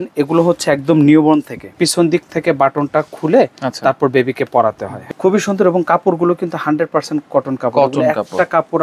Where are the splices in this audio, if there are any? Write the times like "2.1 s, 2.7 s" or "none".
1.7 s, 4.9 s